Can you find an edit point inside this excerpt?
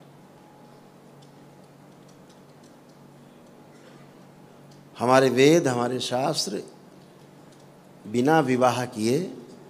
no; 0 cuts

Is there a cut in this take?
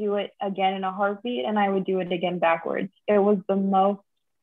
no; 0 cuts

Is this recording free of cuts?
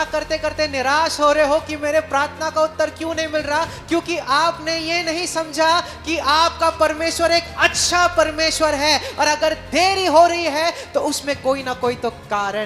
yes; 0 cuts

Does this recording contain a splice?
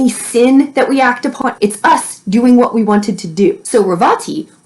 yes; 2 cuts; at 1.4 s, 3.6 s

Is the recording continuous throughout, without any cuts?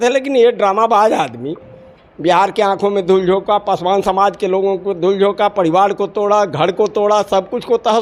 yes; 0 cuts

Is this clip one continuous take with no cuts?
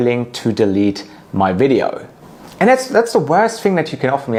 yes; 0 cuts

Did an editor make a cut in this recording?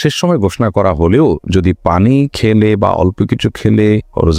no; 0 cuts

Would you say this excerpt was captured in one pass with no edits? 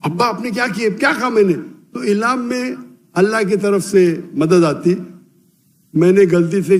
yes; 0 cuts

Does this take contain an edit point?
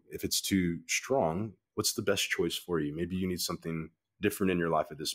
no; 0 cuts

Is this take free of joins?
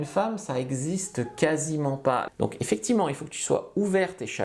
no; 1 cut; at 2.3 s

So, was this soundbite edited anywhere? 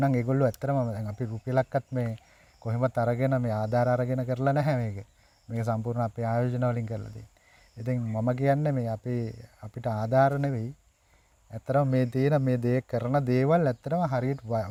no; 0 cuts

